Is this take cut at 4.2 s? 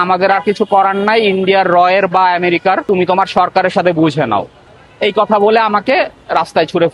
no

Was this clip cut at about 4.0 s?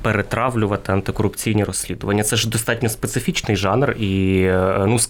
no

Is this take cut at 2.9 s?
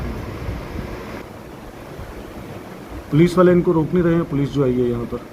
no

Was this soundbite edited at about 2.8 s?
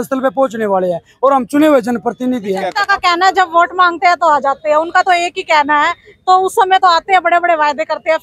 yes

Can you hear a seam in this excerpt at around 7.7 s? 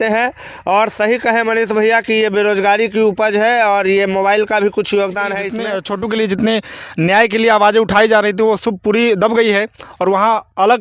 no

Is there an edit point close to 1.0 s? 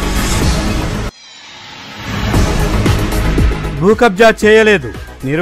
yes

